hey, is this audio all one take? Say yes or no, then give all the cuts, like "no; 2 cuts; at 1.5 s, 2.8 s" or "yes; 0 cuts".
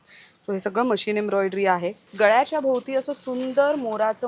no; 1 cut; at 2.0 s